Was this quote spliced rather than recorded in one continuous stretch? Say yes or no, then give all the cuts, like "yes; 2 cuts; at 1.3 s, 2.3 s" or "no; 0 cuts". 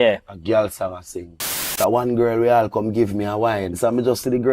yes; 2 cuts; at 1.7 s, 3.7 s